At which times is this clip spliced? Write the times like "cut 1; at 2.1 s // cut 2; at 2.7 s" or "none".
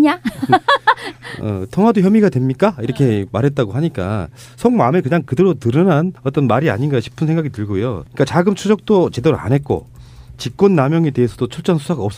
cut 1; at 8.4 s